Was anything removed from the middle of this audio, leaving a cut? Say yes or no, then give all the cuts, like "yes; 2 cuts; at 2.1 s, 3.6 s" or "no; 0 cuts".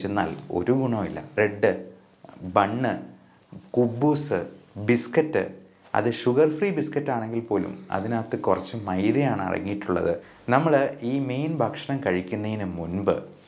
yes; 2 cuts; at 1.4 s, 10.3 s